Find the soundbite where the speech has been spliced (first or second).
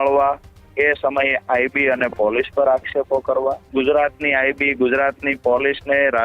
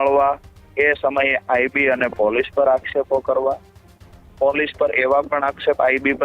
first